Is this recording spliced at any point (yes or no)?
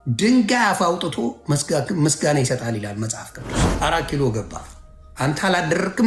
yes